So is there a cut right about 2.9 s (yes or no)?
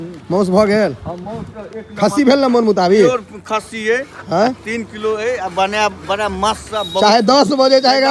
no